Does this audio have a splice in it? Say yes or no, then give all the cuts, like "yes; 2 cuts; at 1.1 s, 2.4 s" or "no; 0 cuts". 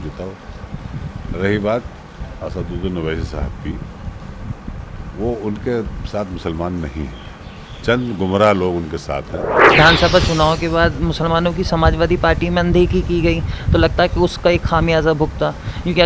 yes; 1 cut; at 9.8 s